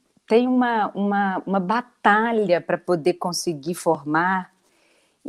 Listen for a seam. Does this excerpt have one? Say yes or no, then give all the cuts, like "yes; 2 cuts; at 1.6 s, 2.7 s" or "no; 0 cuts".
no; 0 cuts